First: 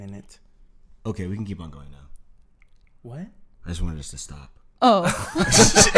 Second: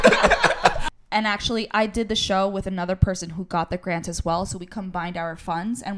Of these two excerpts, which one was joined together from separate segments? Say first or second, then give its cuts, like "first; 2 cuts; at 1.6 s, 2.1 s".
second; 1 cut; at 0.9 s